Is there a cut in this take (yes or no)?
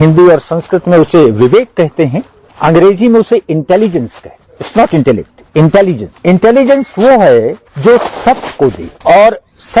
yes